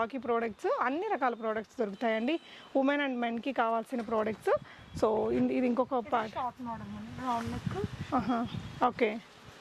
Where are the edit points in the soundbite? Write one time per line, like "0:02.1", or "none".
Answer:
none